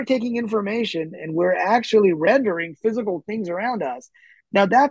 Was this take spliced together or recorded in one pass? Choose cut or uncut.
uncut